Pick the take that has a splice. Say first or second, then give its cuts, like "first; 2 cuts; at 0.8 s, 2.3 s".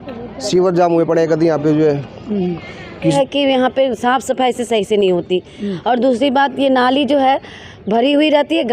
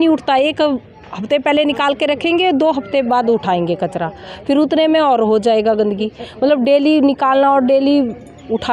first; 1 cut; at 3.1 s